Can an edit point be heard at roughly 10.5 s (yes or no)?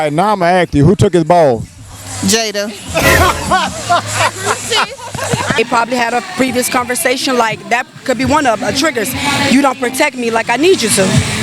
no